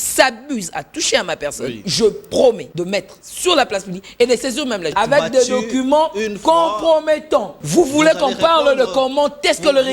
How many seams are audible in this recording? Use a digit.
4